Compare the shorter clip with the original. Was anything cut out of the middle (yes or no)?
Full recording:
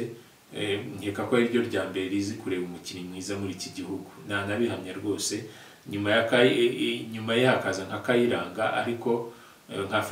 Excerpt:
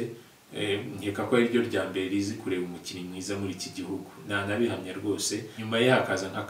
yes